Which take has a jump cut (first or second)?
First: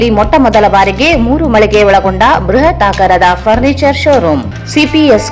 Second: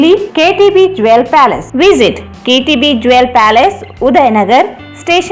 first